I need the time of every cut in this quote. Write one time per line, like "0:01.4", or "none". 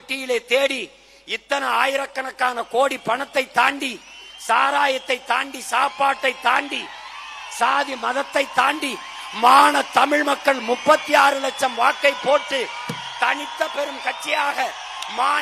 none